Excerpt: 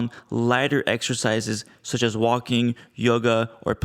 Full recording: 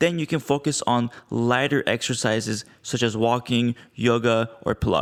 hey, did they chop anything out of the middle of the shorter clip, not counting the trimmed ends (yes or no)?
no